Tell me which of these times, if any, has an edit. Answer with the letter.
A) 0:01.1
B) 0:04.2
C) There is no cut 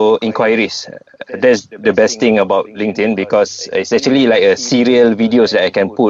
C